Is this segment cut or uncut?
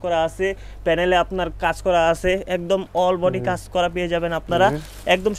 uncut